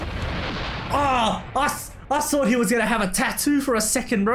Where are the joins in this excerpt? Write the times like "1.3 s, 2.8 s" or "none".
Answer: none